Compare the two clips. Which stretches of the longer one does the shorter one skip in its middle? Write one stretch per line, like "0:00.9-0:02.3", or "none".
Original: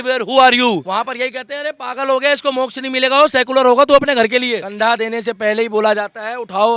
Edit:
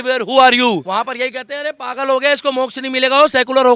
none